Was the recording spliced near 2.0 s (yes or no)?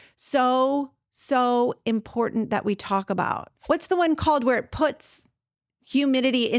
no